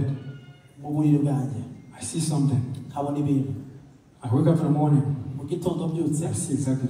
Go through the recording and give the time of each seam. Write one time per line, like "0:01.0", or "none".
none